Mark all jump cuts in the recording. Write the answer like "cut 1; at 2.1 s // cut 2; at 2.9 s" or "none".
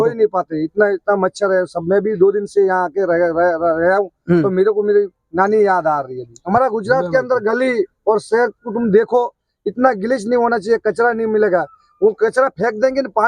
cut 1; at 6.4 s